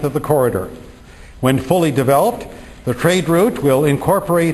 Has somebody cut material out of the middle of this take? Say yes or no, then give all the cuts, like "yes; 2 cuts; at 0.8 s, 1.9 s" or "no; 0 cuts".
yes; 1 cut; at 1.1 s